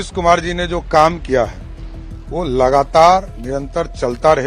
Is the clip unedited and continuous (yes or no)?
yes